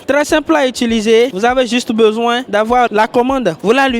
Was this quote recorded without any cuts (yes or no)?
no